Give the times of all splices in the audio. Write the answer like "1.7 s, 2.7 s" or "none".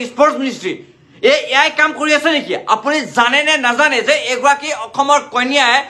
none